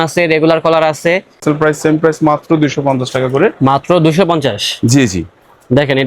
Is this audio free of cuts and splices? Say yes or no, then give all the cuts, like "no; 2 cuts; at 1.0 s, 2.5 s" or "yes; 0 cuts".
no; 1 cut; at 1.4 s